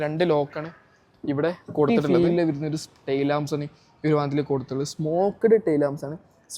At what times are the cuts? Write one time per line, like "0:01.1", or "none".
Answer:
0:01.9